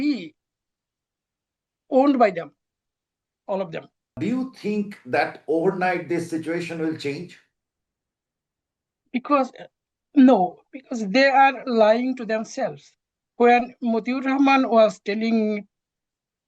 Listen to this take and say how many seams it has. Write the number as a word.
one